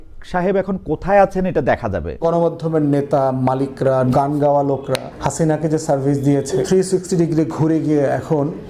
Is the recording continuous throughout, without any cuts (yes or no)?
no